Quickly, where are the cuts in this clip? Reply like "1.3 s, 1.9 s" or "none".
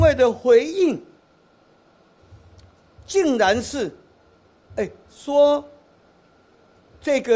none